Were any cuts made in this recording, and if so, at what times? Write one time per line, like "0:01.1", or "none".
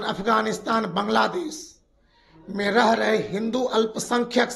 none